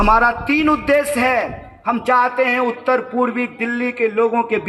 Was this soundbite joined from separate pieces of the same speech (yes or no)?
no